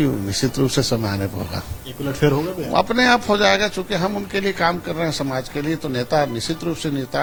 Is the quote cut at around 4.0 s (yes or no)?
no